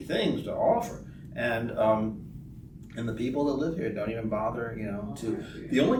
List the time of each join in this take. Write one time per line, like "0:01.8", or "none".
none